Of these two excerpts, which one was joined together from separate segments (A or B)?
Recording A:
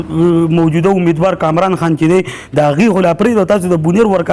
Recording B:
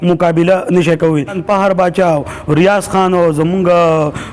B